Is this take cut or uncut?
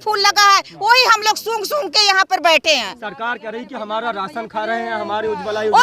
uncut